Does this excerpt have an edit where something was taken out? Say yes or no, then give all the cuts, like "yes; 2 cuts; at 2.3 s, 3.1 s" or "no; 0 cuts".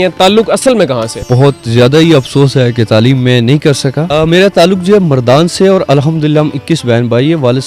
yes; 2 cuts; at 1.3 s, 4.0 s